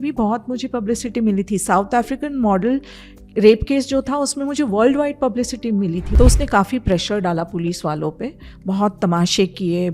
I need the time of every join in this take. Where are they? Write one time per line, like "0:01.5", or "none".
0:06.1